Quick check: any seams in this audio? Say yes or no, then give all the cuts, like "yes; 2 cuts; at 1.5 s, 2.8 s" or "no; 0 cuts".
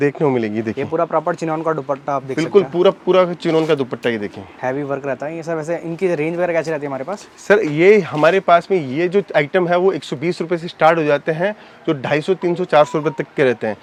no; 0 cuts